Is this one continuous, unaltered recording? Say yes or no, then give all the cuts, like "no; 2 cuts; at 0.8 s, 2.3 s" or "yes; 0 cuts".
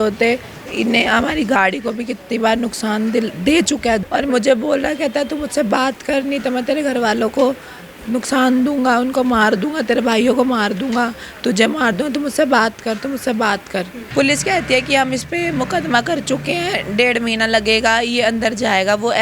no; 2 cuts; at 4.0 s, 14.0 s